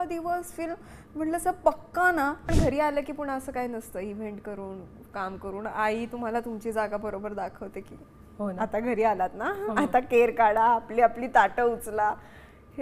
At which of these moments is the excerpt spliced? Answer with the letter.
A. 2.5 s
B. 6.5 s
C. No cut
A